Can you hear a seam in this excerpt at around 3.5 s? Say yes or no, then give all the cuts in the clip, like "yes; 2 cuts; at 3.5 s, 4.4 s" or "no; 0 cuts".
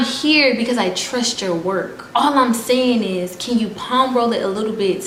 no; 0 cuts